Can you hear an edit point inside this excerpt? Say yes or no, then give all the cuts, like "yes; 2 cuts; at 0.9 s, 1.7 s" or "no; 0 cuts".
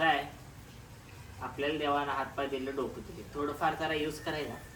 no; 0 cuts